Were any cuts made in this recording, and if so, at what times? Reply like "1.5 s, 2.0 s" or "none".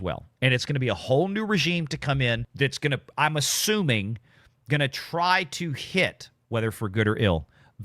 2.5 s